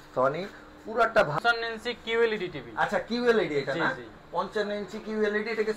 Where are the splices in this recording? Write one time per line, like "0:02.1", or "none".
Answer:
0:01.3